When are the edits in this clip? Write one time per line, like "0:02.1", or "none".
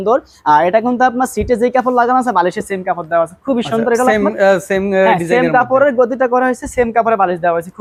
none

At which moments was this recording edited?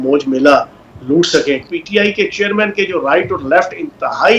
0:01.6

